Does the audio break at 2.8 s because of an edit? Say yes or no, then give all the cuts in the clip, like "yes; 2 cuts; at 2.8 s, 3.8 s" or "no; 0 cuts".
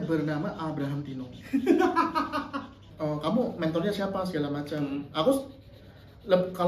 yes; 1 cut; at 2.8 s